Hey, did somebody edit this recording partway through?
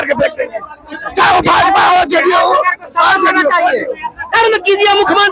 yes; 1 cut; at 4.2 s

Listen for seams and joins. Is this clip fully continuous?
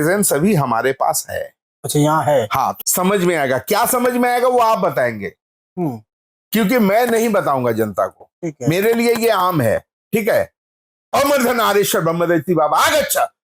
no; 1 cut; at 2.8 s

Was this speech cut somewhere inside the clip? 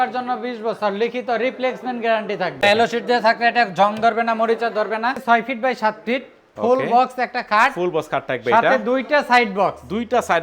yes; 2 cuts; at 2.6 s, 5.2 s

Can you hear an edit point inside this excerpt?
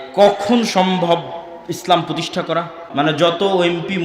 yes; 1 cut; at 2.8 s

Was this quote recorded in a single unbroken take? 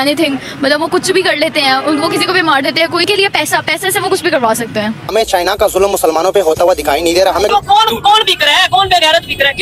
no; 3 cuts; at 3.1 s, 5.1 s, 7.5 s

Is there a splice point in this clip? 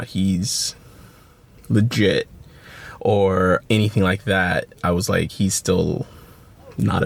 no; 0 cuts

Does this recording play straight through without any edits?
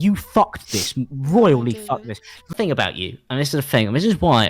no; 1 cut; at 2.5 s

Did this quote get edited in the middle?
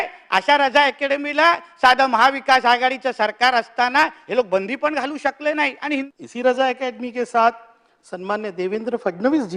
yes; 1 cut; at 6.1 s

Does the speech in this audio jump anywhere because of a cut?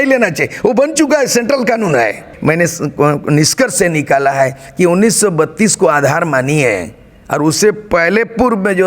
yes; 1 cut; at 2.3 s

